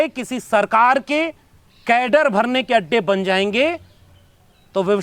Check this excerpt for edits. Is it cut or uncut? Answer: uncut